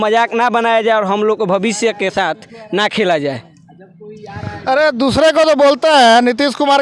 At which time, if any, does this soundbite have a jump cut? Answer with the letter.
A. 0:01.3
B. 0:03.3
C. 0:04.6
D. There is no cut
D